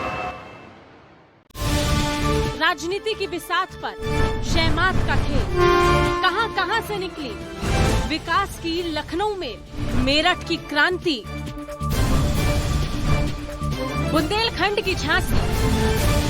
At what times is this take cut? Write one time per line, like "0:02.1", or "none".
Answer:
0:01.3